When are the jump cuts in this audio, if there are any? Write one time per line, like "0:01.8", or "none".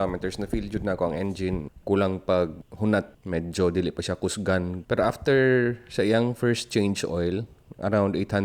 0:01.7
0:03.2
0:04.8

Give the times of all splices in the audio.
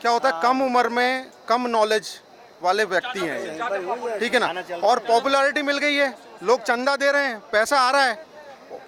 none

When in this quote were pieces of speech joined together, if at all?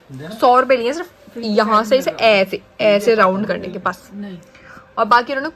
none

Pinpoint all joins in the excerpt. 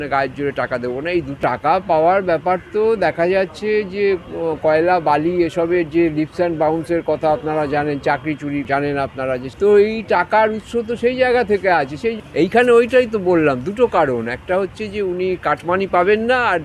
0:01.4
0:08.7
0:09.5
0:12.2

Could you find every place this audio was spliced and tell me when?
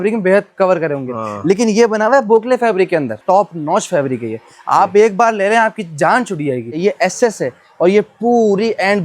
0:03.2
0:06.8

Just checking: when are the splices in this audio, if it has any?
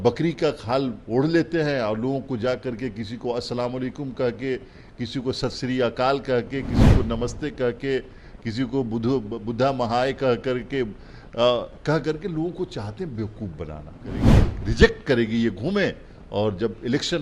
0:14.2

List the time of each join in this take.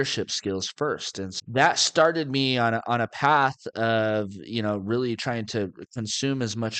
0:01.3

